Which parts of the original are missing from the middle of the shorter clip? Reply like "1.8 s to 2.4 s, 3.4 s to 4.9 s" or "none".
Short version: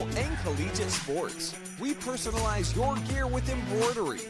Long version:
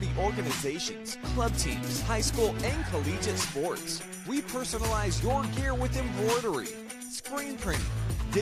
none

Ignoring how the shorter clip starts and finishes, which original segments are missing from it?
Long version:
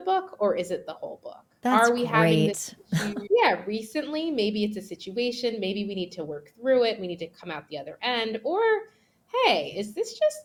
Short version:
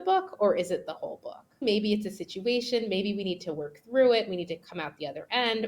1.6 s to 4.3 s

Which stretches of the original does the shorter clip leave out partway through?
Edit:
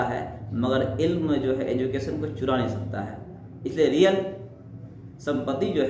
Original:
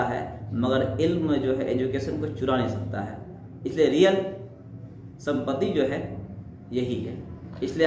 none

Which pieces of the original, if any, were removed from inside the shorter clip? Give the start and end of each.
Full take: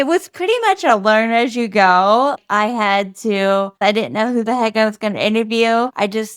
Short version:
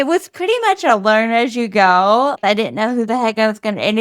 2.4 s to 3.8 s

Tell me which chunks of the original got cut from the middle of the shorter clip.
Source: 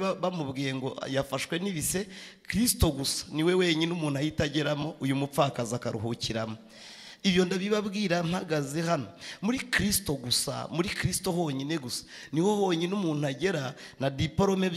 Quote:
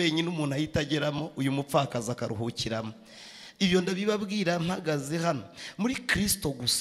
none

